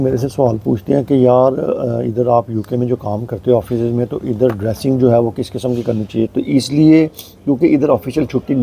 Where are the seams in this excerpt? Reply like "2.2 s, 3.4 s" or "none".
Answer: 6.3 s